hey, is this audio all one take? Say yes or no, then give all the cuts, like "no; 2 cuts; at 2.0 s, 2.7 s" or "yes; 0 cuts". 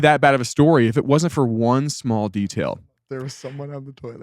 no; 1 cut; at 2.9 s